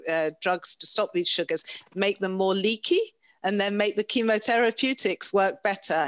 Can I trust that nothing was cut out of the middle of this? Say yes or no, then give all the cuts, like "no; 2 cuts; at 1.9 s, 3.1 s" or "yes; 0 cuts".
yes; 0 cuts